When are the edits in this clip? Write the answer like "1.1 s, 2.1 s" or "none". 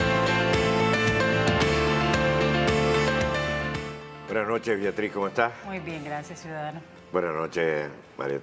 2.8 s